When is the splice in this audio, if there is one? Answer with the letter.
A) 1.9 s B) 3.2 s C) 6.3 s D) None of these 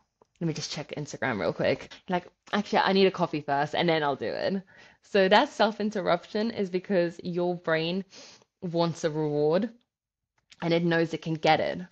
A